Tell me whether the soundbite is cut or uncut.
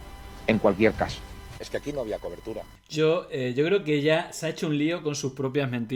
uncut